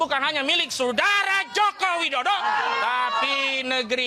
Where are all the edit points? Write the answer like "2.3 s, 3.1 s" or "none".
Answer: none